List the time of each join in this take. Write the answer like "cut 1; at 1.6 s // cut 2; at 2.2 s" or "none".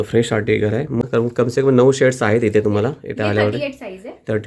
cut 1; at 1.0 s